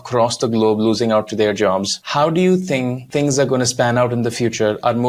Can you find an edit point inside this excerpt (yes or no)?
no